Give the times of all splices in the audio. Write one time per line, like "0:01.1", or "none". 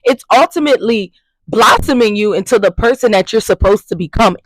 none